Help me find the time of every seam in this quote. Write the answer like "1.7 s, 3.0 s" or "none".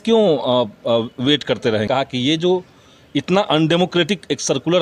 1.9 s